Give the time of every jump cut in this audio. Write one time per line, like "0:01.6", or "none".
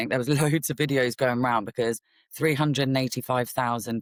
none